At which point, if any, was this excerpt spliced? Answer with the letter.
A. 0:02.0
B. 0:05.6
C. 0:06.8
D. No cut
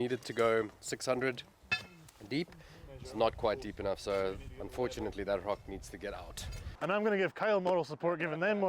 C